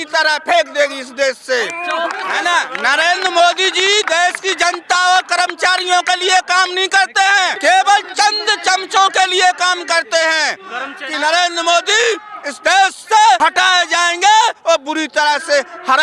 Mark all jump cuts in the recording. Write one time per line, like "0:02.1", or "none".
0:02.2
0:07.5
0:11.0
0:13.4